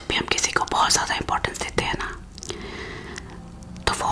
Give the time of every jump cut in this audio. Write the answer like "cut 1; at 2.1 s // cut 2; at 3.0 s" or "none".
cut 1; at 2.4 s